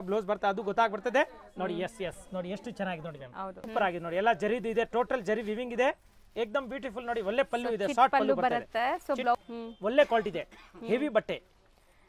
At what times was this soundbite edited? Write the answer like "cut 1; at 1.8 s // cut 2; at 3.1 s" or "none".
cut 1; at 3.6 s // cut 2; at 9.4 s